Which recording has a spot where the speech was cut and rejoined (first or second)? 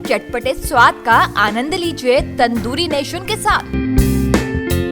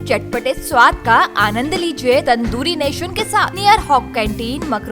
second